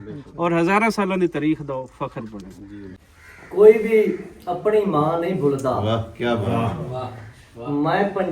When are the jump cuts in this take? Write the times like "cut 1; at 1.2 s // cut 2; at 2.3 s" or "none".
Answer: cut 1; at 2.9 s